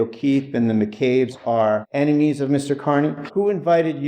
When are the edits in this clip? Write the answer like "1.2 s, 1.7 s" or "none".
1.3 s, 3.2 s